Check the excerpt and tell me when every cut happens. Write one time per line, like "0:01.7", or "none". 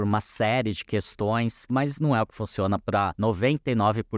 0:01.7
0:03.1

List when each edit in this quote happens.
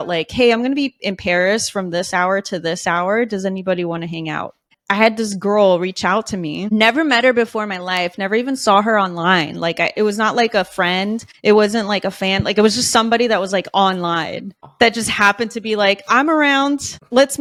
none

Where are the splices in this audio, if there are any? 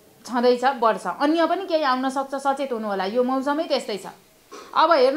none

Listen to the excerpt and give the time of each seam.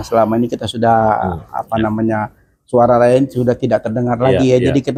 none

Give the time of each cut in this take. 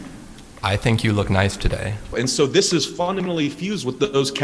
0:02.1

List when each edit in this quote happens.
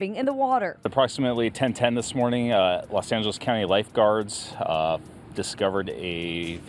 0:01.2

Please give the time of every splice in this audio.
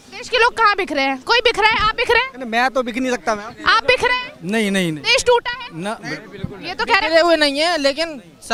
none

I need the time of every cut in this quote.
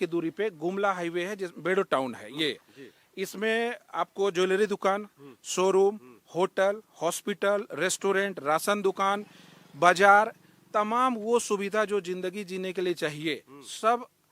none

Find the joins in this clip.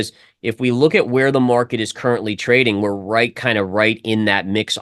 none

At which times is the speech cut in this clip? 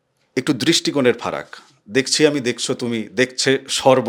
none

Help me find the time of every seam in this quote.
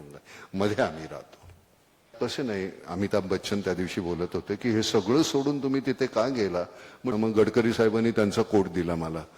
0:02.1
0:07.1

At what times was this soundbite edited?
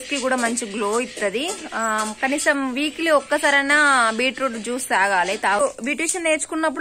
0:05.6

